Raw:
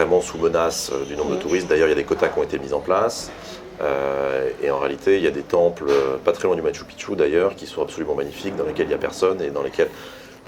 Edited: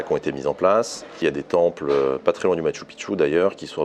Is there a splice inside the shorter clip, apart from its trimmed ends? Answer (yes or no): yes